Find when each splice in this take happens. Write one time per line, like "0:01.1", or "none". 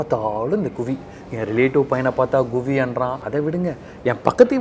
none